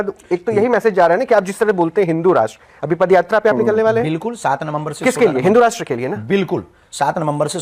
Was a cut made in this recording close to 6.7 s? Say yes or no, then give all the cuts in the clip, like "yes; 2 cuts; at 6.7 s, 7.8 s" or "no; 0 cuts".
no; 0 cuts